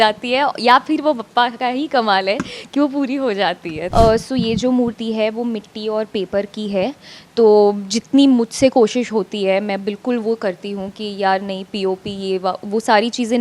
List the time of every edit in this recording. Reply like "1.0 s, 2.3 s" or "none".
3.9 s

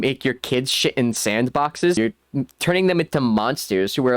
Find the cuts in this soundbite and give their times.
2.0 s

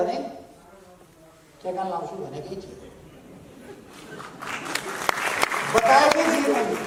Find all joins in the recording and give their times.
none

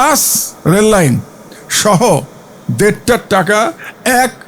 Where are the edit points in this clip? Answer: none

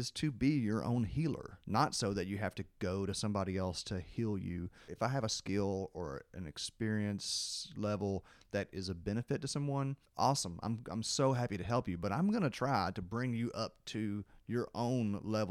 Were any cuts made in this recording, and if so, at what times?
1.5 s, 4.8 s, 10.0 s

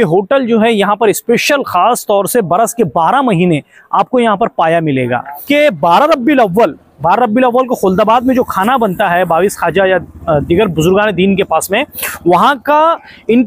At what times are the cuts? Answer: 5.3 s

